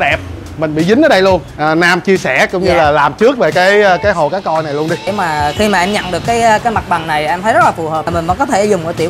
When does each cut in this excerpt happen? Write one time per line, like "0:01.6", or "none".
0:01.5
0:05.0
0:08.1

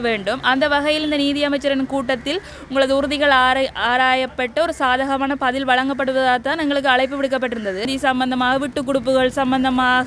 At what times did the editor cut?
0:07.9

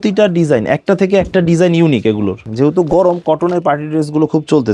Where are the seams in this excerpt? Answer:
0:02.5

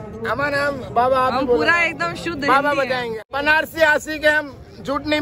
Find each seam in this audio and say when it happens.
0:03.4

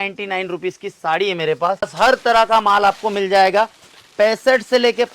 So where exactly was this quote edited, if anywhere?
0:01.9

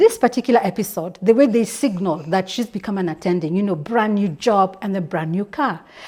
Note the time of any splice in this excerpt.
none

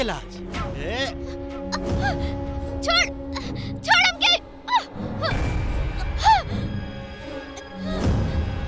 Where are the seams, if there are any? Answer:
none

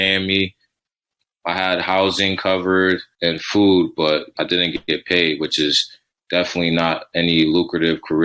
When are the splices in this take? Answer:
0:01.0
0:03.1
0:04.3

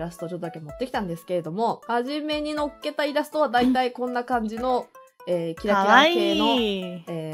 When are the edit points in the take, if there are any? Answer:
none

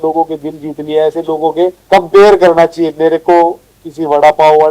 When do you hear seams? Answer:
0:01.8

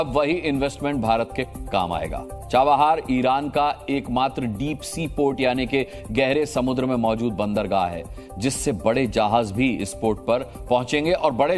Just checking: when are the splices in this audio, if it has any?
0:08.6

